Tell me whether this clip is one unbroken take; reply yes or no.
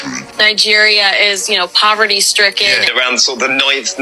no